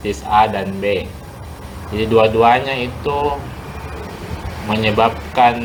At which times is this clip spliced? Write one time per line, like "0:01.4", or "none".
none